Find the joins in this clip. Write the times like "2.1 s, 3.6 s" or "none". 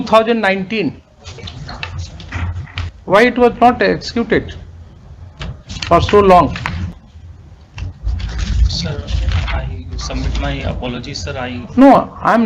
2.9 s